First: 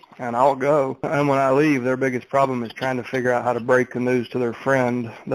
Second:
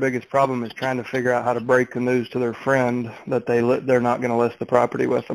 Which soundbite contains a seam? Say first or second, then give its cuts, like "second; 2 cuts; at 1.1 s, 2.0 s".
first; 1 cut; at 1.1 s